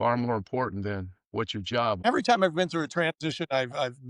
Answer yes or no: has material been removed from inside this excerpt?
yes